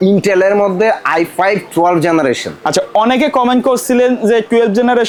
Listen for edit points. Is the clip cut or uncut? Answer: uncut